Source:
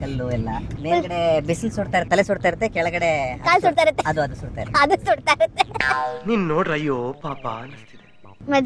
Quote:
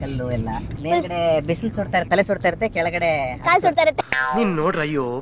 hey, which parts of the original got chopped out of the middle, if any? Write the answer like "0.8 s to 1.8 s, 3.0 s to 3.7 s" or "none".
4.1 s to 6.0 s